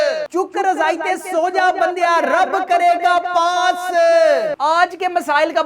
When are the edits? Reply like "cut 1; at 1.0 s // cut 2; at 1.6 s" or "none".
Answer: cut 1; at 4.5 s